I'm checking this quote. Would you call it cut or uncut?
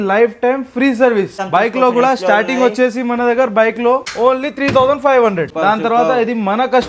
cut